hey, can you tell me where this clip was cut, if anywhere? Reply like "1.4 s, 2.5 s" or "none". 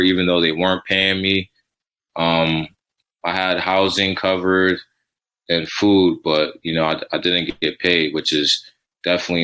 none